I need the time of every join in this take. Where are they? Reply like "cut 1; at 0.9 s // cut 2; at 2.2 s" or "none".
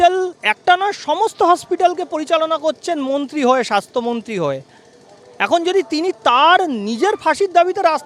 none